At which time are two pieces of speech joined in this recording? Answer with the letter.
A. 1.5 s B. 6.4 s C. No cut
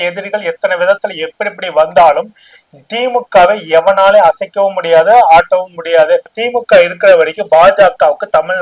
B